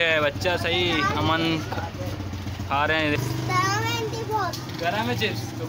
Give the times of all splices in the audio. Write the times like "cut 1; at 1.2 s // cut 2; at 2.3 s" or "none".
cut 1; at 3.2 s // cut 2; at 4.9 s